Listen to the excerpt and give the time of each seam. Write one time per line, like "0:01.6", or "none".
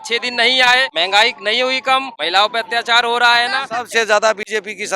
0:00.9
0:02.1
0:03.7